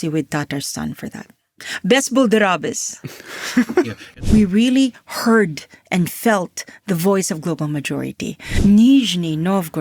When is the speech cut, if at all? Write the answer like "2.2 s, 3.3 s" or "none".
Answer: 4.0 s, 8.5 s